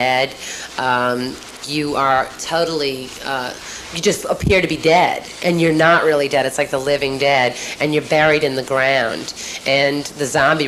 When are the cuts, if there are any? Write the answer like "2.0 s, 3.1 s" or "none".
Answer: 3.0 s